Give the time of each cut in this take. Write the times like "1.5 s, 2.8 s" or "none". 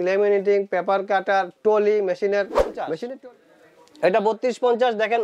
3.1 s